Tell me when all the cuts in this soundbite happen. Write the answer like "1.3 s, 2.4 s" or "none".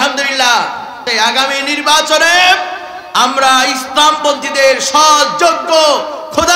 1.0 s